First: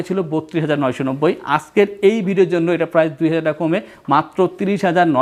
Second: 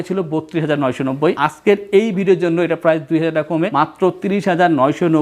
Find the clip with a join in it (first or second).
second